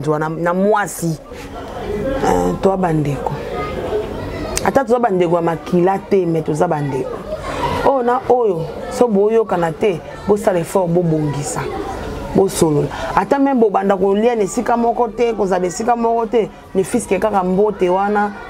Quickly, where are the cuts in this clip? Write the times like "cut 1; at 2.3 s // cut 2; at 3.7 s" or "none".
cut 1; at 1.4 s